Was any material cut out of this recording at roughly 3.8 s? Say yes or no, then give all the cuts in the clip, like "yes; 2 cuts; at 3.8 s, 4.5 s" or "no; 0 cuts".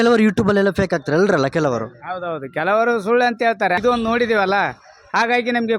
yes; 1 cut; at 3.8 s